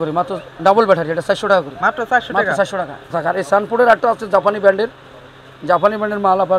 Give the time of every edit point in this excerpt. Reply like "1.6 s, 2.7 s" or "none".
3.1 s